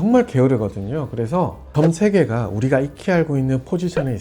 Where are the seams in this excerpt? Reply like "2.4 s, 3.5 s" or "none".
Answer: 1.6 s